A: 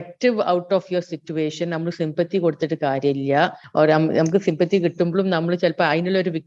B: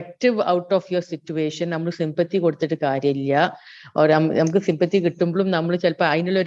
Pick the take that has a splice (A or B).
A